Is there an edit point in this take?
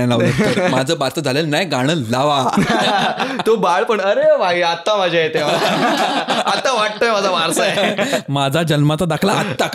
no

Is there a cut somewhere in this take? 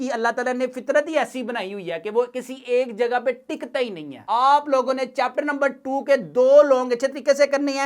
yes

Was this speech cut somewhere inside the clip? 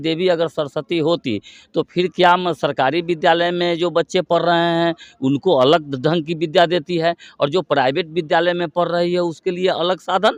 no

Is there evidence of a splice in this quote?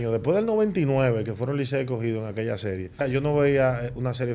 yes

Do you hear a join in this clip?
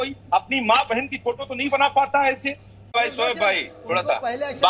yes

